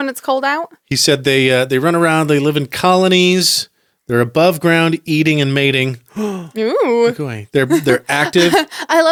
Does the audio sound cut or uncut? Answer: uncut